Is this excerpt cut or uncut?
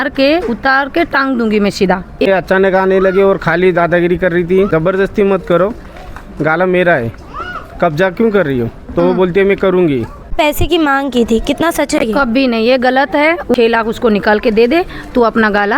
cut